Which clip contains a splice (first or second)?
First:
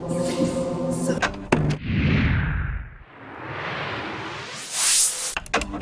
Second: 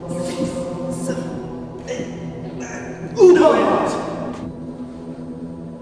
second